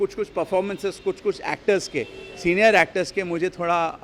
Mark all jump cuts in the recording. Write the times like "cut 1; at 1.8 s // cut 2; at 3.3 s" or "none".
none